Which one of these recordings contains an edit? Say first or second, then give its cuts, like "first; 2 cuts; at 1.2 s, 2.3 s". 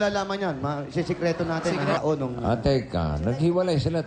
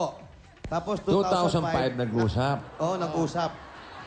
first; 1 cut; at 2.0 s